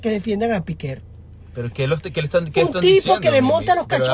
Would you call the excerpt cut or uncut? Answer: uncut